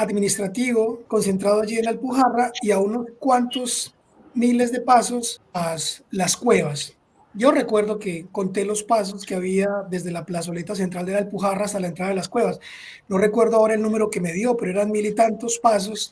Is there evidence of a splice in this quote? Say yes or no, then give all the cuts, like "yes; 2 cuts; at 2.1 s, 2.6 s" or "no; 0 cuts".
yes; 2 cuts; at 1.0 s, 5.4 s